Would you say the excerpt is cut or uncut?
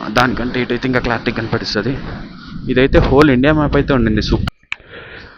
cut